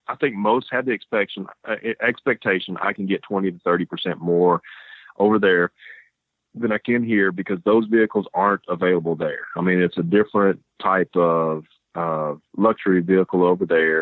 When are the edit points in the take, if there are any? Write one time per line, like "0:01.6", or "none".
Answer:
none